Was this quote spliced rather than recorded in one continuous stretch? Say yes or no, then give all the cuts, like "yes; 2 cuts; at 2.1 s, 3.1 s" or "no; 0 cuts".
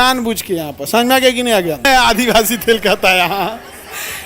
yes; 1 cut; at 1.9 s